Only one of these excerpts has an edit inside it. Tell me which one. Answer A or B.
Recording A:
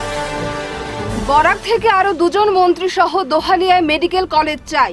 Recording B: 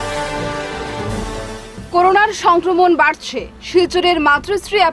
A